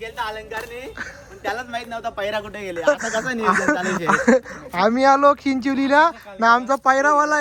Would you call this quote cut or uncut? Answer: uncut